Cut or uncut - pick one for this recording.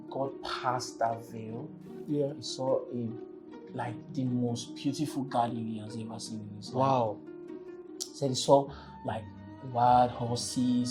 uncut